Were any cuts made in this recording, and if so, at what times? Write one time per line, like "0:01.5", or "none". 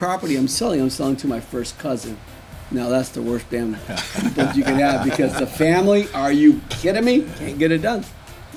0:07.4